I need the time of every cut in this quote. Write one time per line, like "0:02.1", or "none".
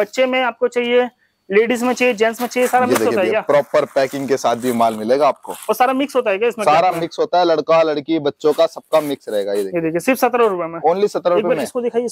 none